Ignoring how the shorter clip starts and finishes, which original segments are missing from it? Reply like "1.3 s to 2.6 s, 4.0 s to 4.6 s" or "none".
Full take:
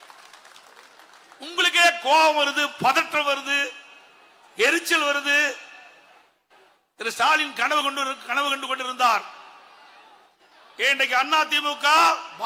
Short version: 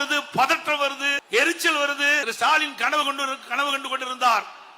3.6 s to 4.4 s, 5.5 s to 7.0 s